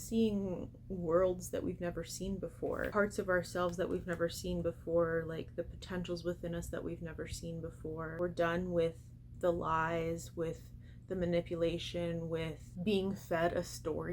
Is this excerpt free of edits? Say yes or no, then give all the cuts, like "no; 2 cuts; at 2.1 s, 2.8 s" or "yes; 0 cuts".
no; 3 cuts; at 2.9 s, 8.2 s, 12.6 s